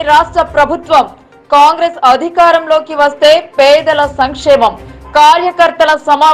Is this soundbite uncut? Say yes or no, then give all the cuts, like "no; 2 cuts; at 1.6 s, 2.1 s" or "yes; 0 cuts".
yes; 0 cuts